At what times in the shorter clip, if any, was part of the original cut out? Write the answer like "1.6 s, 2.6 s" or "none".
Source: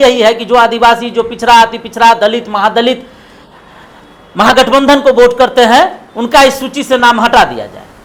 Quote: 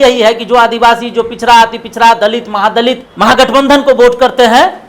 3.1 s